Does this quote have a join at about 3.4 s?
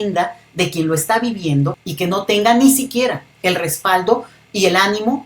no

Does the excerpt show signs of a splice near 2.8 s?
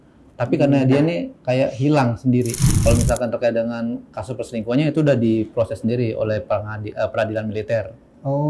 yes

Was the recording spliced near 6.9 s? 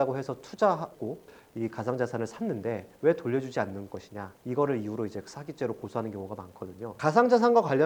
yes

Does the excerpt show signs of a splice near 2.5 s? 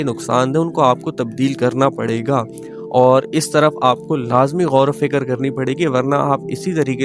no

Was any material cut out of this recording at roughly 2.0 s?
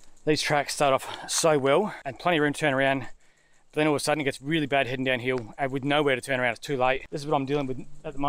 yes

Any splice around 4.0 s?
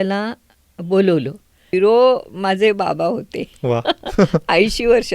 no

